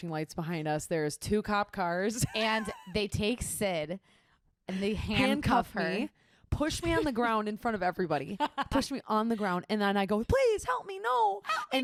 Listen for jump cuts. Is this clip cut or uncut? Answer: uncut